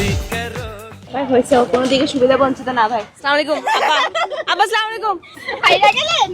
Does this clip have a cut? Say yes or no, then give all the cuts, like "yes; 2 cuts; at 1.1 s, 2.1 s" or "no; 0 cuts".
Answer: yes; 1 cut; at 5.4 s